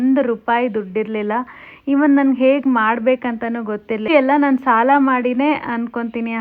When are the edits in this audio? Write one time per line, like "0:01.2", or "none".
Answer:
0:04.1